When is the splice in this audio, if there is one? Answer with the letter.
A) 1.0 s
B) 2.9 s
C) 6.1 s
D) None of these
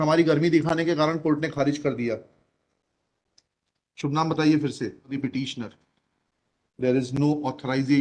D